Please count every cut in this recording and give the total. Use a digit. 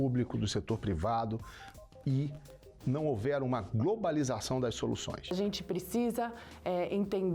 1